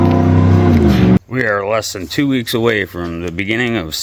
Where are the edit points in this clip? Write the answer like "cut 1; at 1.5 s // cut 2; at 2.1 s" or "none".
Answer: cut 1; at 1.2 s

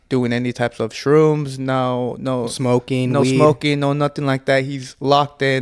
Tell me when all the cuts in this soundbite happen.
none

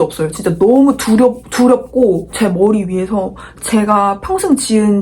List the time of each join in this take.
cut 1; at 2.3 s

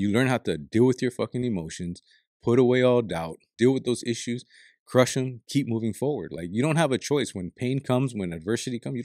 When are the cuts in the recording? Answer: cut 1; at 3.5 s

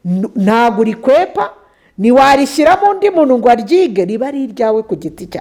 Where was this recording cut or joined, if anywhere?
none

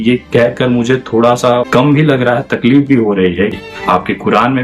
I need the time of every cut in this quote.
cut 1; at 1.7 s // cut 2; at 3.5 s

